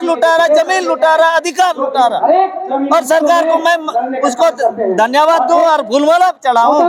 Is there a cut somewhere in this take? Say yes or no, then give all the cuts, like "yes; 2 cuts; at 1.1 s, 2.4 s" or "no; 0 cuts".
no; 0 cuts